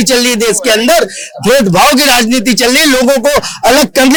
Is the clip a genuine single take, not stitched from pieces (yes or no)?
yes